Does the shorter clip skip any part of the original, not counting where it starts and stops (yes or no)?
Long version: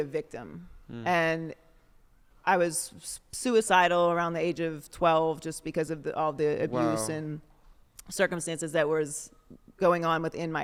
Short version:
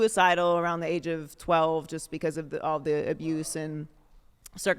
no